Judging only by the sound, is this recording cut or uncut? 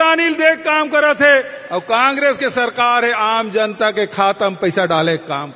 uncut